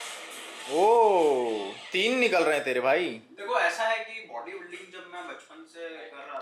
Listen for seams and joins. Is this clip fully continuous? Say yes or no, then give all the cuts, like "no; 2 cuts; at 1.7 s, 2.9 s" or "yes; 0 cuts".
yes; 0 cuts